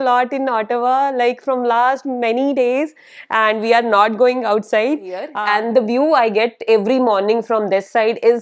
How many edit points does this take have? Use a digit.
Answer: 1